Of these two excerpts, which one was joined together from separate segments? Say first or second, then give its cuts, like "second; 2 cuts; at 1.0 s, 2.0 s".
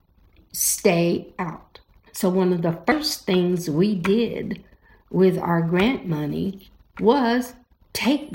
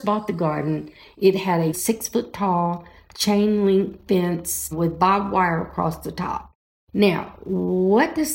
first; 1 cut; at 2.0 s